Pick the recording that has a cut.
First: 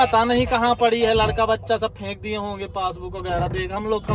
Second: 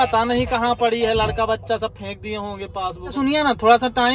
second; 1 cut; at 3.1 s

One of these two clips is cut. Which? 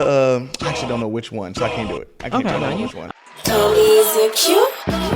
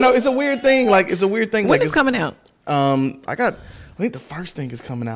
first; 1 cut; at 3.1 s

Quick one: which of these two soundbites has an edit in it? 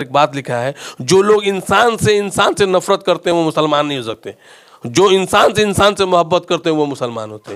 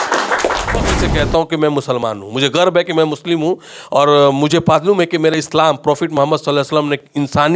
second; 1 cut; at 0.9 s

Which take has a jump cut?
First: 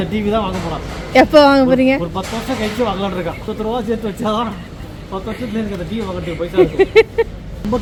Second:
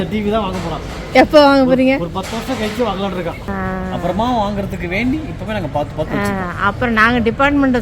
second; 1 cut; at 3.4 s

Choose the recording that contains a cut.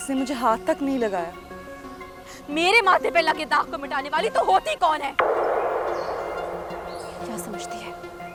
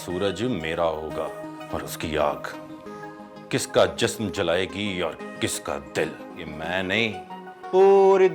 second; 2 cuts; at 1.6 s, 6.3 s

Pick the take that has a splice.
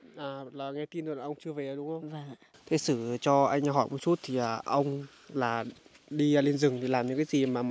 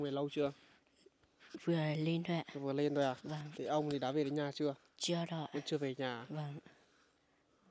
first; 1 cut; at 2.5 s

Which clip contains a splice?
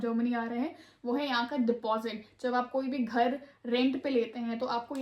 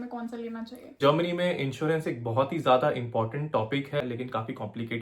second; 2 cuts; at 1.0 s, 4.0 s

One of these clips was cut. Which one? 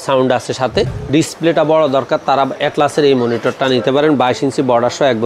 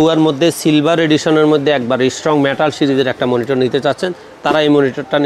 first; 1 cut; at 0.9 s

